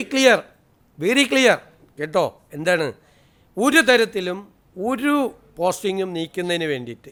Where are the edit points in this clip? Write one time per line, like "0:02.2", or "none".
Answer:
none